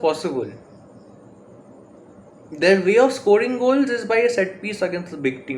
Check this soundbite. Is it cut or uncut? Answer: uncut